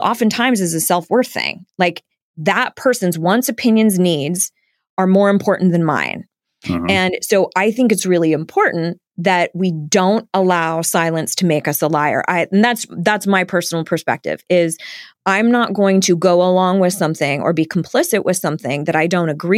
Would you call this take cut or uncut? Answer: cut